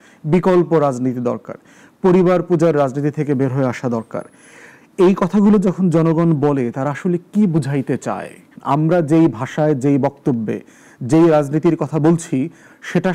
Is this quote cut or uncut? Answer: cut